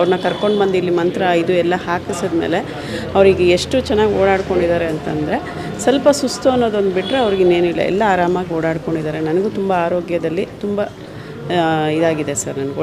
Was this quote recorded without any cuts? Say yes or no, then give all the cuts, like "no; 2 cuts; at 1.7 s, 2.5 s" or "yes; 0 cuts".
yes; 0 cuts